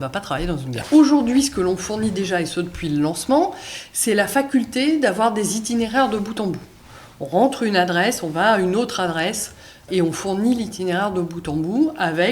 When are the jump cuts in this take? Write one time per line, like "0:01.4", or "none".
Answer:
0:00.8
0:09.8